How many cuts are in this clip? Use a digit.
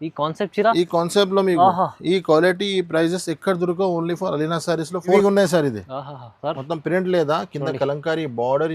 1